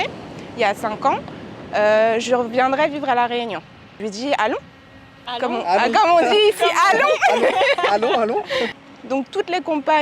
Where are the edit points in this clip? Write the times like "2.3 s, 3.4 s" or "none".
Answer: 4.0 s, 8.9 s